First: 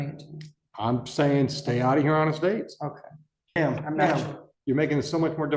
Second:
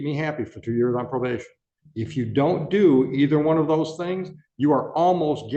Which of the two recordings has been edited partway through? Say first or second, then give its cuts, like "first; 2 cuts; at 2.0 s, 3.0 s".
first; 1 cut; at 3.6 s